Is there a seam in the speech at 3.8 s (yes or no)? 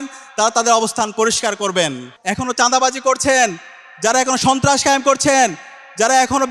no